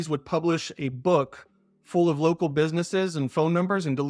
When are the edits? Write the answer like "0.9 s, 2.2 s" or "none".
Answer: none